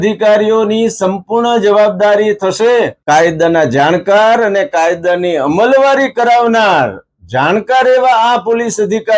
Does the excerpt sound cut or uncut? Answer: cut